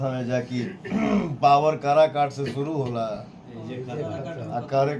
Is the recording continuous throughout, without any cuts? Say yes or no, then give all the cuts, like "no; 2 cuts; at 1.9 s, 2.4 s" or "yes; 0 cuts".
yes; 0 cuts